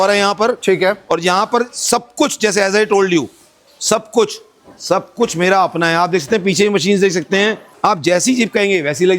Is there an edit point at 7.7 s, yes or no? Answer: yes